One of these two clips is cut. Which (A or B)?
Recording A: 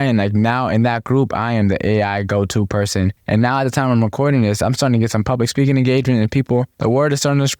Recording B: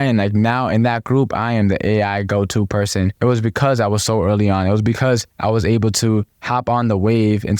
B